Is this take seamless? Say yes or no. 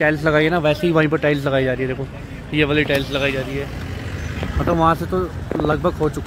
yes